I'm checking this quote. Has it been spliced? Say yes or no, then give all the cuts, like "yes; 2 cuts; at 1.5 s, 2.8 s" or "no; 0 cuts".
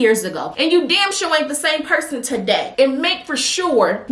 yes; 1 cut; at 2.7 s